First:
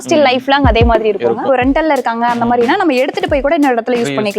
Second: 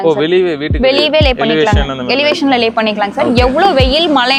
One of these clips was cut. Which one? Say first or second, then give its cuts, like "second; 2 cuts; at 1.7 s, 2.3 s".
first; 1 cut; at 1.4 s